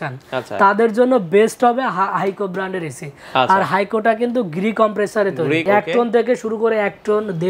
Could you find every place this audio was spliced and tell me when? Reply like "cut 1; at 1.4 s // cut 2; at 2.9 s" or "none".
cut 1; at 5.6 s